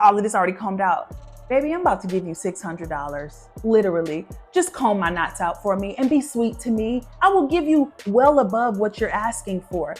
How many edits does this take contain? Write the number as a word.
zero